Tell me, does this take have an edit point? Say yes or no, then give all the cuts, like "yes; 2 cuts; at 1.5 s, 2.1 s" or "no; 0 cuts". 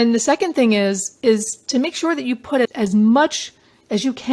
yes; 1 cut; at 2.6 s